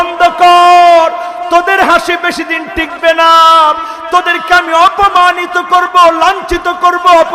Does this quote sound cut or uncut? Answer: uncut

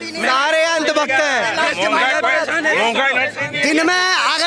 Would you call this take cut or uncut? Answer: uncut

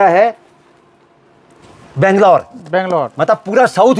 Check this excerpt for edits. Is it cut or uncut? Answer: uncut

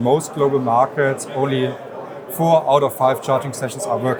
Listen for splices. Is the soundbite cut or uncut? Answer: uncut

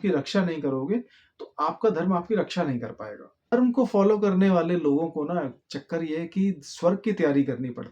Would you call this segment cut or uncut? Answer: cut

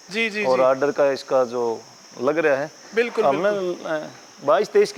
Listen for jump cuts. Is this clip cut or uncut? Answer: uncut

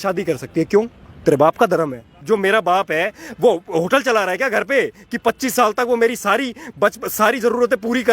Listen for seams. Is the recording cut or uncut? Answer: cut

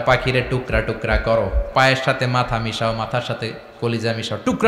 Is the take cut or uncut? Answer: cut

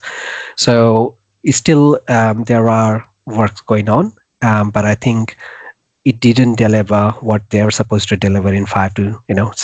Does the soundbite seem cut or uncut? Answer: uncut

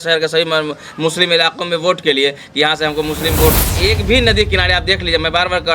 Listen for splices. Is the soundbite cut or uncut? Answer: cut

